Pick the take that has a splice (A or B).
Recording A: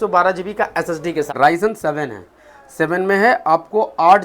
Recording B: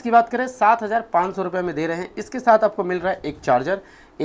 A